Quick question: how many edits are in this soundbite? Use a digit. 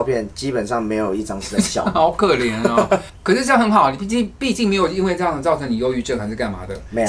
0